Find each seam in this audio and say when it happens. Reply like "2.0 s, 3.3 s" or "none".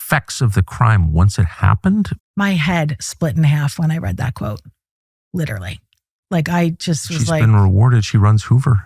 2.2 s